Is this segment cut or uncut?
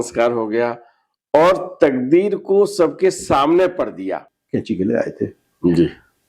cut